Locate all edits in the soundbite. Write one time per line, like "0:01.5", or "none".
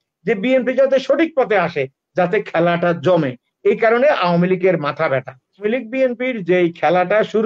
0:05.6